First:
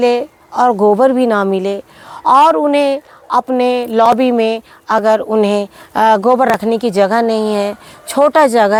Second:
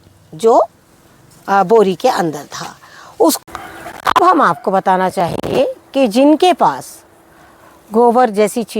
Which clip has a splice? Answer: second; 1 cut; at 3.4 s

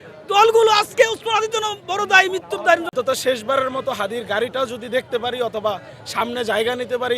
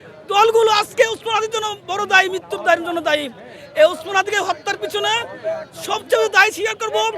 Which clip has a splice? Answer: first; 1 cut; at 2.9 s

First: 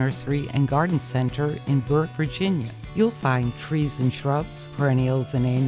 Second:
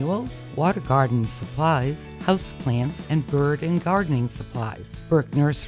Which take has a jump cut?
first; 1 cut; at 2.1 s

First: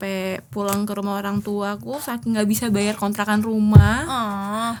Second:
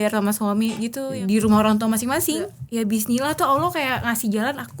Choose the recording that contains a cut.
second; 2 cuts; at 1.1 s, 2.6 s

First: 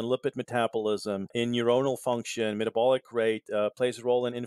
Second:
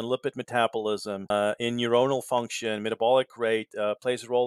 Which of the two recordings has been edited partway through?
first; 1 cut; at 1.3 s

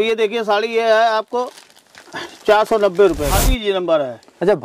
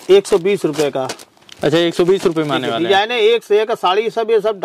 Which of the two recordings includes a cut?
first; 1 cut; at 3.3 s

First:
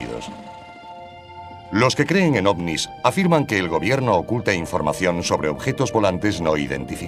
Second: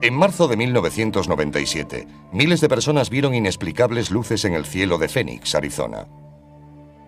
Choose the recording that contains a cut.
first; 1 cut; at 3.7 s

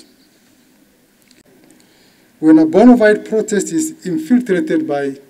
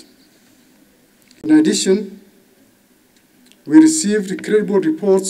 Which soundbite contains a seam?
first; 1 cut; at 1.3 s

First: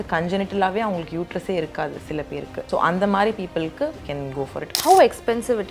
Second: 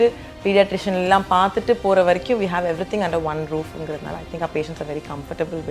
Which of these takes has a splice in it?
first; 2 cuts; at 2.6 s, 4.2 s

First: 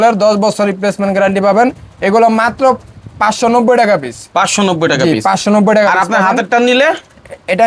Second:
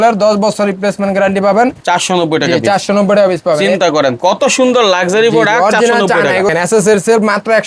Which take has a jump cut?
second; 2 cuts; at 1.8 s, 6.5 s

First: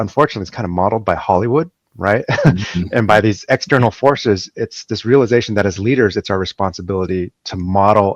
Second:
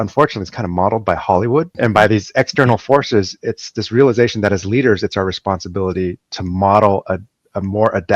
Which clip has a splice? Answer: second; 1 cut; at 1.7 s

